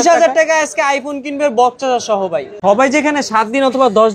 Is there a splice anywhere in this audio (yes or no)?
yes